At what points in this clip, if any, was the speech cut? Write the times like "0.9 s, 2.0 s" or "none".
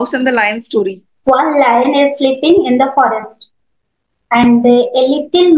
1.1 s